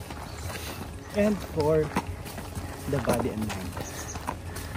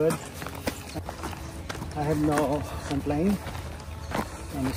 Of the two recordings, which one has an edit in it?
second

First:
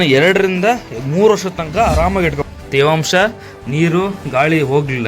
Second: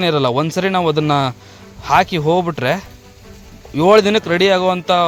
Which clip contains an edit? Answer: first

